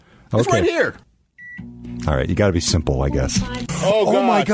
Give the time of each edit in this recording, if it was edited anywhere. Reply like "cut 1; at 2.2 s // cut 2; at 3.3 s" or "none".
cut 1; at 0.9 s // cut 2; at 3.6 s